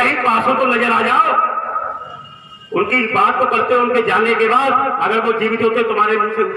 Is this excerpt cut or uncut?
uncut